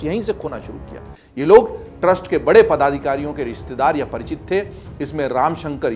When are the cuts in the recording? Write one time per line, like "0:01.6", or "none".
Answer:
none